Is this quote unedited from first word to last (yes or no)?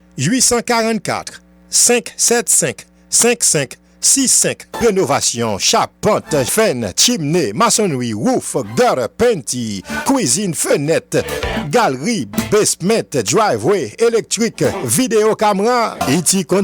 no